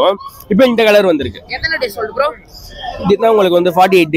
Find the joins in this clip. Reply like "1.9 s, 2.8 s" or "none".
none